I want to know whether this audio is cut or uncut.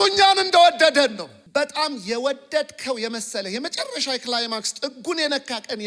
cut